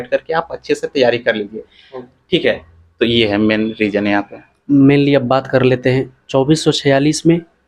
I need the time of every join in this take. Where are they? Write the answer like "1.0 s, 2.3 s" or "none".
none